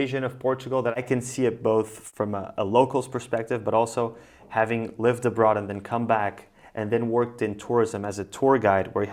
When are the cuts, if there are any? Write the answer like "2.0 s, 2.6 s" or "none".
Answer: none